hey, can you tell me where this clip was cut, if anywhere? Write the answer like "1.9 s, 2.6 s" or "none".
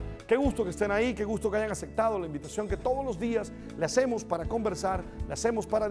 4.8 s